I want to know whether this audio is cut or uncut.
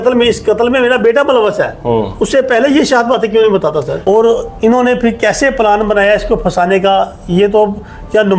cut